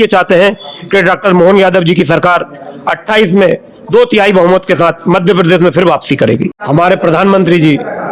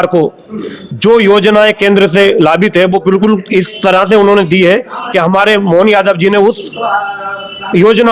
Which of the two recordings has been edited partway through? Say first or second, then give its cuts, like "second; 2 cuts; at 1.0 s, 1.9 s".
first; 1 cut; at 6.5 s